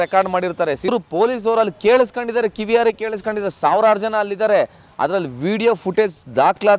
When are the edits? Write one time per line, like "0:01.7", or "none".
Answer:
0:00.9